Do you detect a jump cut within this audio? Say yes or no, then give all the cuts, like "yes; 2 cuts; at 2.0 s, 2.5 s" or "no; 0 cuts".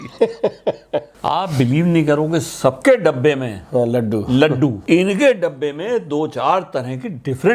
yes; 2 cuts; at 1.1 s, 4.8 s